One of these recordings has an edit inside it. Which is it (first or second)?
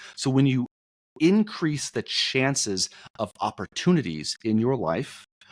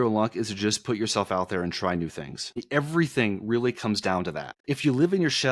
second